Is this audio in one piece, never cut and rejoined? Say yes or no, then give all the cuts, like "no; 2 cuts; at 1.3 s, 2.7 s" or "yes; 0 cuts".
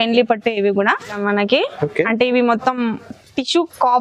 no; 1 cut; at 1.2 s